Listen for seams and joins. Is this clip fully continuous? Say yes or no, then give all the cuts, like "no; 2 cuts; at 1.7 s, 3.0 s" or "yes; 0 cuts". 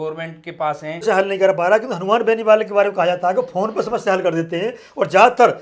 no; 1 cut; at 1.0 s